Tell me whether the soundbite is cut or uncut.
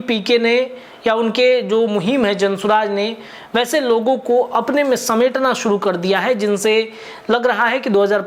uncut